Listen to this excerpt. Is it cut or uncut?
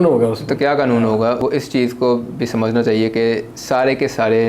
cut